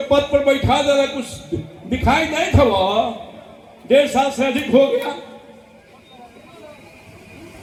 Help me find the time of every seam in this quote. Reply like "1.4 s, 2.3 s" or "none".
none